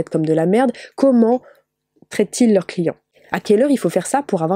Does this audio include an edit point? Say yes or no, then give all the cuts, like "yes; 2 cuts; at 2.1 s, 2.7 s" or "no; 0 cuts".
yes; 1 cut; at 3.0 s